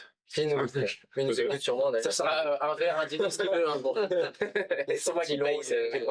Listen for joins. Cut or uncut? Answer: uncut